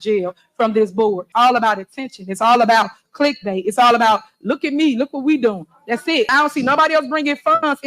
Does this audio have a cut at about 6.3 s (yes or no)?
yes